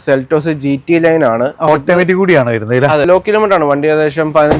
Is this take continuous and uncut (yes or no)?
no